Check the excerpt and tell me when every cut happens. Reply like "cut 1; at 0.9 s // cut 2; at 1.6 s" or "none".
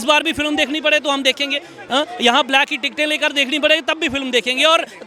none